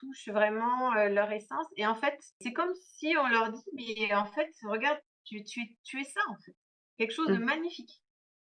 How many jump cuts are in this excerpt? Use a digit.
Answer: 1